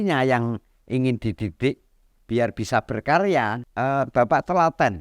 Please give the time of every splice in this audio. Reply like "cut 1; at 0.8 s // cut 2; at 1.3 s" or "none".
cut 1; at 3.6 s